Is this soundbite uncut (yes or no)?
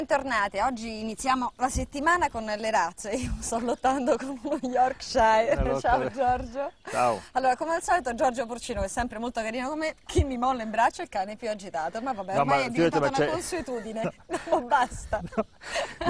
yes